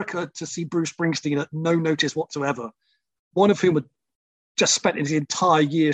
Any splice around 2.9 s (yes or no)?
no